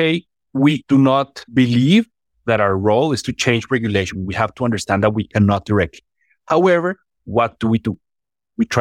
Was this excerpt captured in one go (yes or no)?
no